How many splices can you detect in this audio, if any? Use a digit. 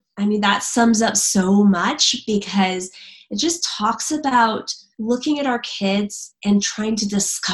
1